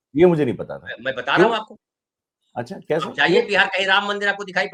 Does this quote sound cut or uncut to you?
uncut